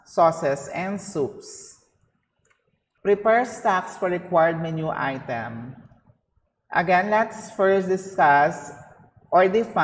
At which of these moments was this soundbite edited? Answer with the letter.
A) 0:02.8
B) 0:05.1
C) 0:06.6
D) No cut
A